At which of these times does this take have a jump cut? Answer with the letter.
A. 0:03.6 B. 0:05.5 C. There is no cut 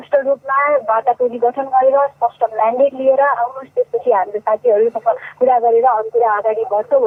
C